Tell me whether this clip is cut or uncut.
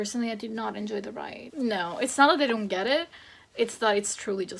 cut